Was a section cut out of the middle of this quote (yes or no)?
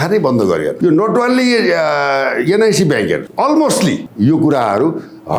yes